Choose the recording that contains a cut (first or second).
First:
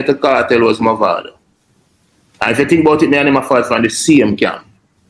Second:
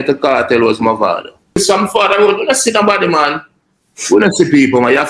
second